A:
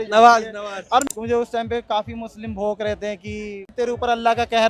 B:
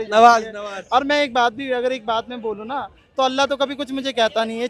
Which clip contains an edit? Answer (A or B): A